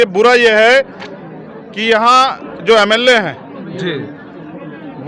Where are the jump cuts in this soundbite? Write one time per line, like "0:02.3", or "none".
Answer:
none